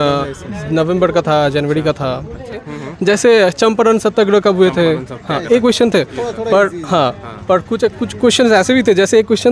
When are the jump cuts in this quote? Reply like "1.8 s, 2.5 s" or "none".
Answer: 2.6 s